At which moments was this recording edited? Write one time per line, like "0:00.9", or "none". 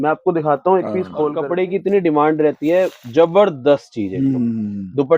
0:01.3